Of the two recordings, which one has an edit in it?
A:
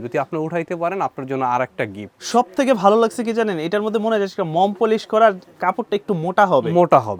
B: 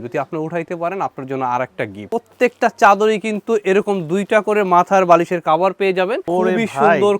B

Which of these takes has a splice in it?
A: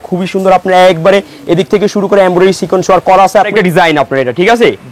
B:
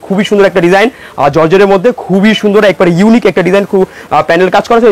A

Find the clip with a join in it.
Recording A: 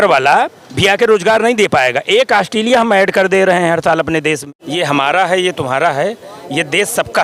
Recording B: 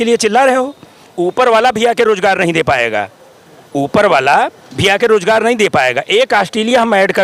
A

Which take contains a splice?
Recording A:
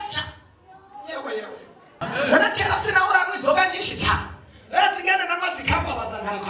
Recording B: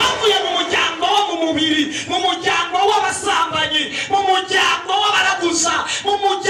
A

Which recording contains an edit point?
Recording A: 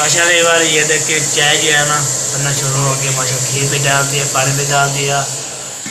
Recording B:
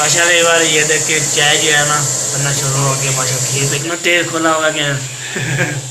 B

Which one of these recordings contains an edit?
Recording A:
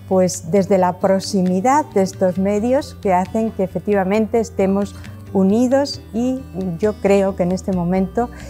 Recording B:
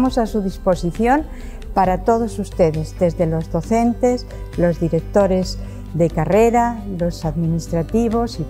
A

